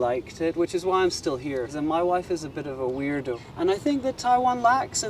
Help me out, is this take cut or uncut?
cut